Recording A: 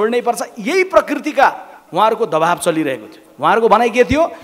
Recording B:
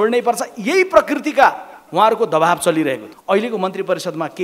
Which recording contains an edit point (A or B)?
B